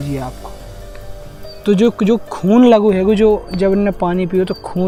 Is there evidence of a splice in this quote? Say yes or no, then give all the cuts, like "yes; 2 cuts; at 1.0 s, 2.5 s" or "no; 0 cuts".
no; 0 cuts